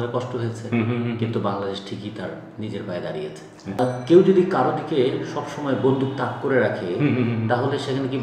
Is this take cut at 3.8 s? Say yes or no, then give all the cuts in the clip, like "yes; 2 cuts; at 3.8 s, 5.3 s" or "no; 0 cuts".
yes; 1 cut; at 3.8 s